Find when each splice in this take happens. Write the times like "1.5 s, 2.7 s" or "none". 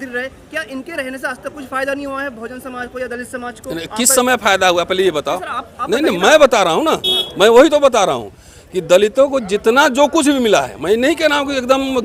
none